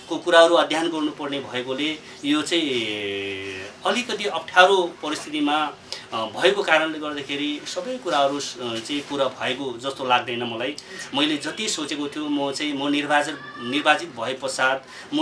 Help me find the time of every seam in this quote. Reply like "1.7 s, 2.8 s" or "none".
none